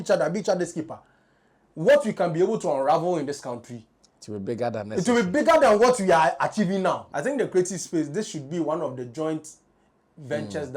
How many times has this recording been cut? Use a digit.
1